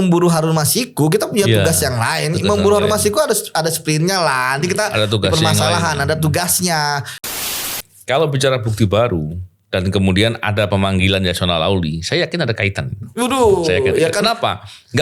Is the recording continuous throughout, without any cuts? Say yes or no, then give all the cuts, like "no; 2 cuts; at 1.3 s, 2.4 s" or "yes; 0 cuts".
no; 1 cut; at 7.4 s